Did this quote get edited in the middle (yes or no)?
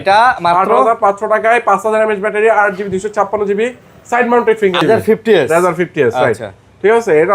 yes